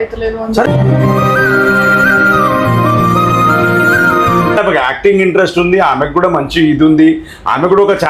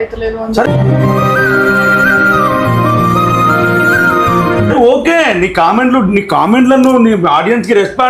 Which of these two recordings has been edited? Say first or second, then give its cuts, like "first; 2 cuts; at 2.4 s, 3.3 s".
first; 1 cut; at 4.6 s